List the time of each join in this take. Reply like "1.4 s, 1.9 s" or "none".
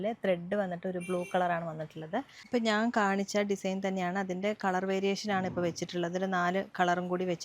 2.4 s